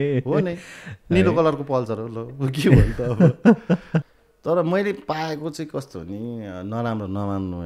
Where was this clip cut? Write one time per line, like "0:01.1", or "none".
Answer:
0:04.0